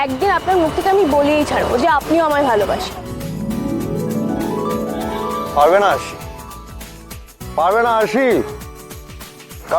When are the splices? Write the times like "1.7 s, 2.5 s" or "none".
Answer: none